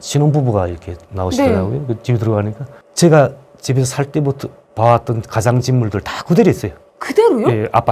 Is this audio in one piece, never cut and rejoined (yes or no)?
no